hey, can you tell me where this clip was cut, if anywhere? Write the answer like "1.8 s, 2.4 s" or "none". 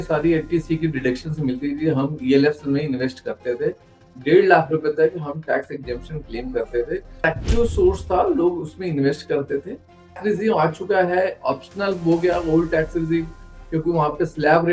7.2 s, 10.2 s